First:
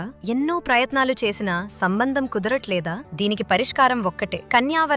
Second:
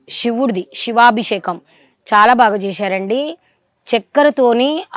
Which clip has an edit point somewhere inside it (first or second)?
first